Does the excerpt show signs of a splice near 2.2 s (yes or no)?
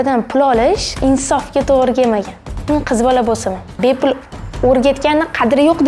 no